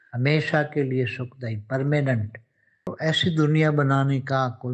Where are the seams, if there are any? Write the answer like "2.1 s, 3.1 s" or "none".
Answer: 2.9 s

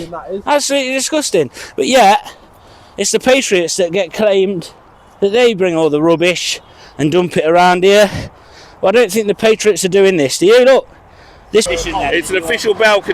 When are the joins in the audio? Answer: 11.7 s

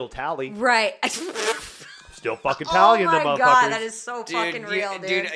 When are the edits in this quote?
none

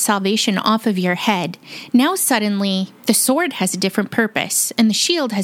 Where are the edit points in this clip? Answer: none

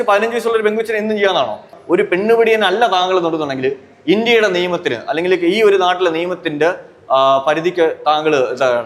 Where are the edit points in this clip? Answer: 1.7 s

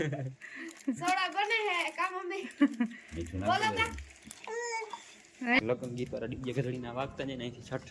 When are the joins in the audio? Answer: 5.6 s

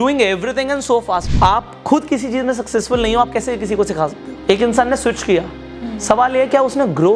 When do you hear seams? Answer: 1.3 s, 4.3 s, 5.6 s

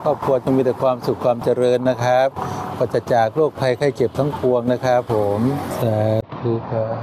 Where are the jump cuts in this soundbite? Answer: 5.7 s

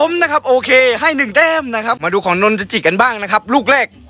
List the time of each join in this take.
2.0 s

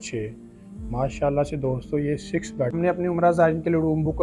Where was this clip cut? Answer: 2.7 s

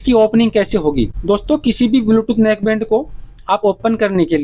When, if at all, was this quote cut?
none

